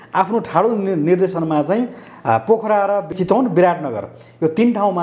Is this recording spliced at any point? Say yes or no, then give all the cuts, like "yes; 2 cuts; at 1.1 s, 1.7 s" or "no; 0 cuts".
yes; 1 cut; at 3.1 s